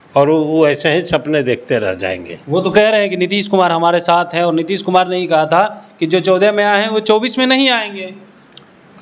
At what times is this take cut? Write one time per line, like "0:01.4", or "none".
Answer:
none